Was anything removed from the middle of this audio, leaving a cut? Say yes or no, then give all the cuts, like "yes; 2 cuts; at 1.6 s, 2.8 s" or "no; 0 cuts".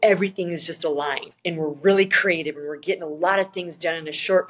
yes; 1 cut; at 1.3 s